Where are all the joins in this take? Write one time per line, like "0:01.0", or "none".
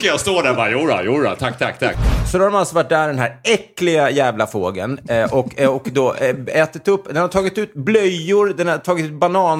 0:02.0